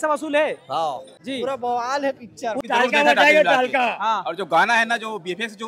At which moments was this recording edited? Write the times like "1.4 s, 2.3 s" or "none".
1.1 s, 2.6 s